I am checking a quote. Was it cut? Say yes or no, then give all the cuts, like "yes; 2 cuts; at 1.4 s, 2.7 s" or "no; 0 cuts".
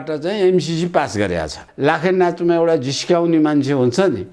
yes; 1 cut; at 1.7 s